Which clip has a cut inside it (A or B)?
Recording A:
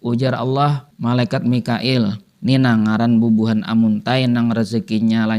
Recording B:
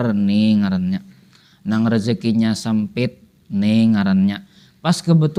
A